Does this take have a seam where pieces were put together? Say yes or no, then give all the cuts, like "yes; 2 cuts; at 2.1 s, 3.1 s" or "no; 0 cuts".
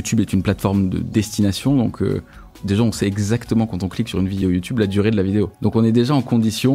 yes; 4 cuts; at 1.0 s, 2.6 s, 4.4 s, 5.5 s